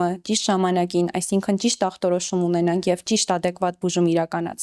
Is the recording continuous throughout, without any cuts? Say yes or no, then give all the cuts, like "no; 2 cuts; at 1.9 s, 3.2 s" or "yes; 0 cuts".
yes; 0 cuts